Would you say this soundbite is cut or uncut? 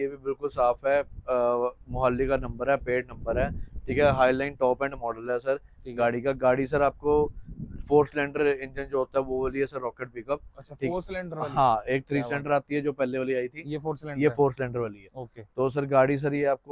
uncut